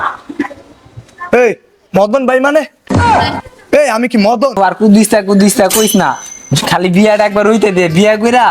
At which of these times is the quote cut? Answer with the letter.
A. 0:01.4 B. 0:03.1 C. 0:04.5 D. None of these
C